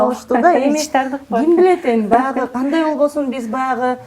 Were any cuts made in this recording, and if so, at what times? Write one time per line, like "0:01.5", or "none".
none